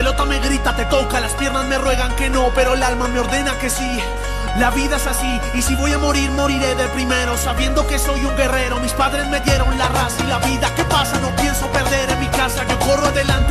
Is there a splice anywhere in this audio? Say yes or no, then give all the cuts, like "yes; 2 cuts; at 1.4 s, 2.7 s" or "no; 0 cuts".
no; 0 cuts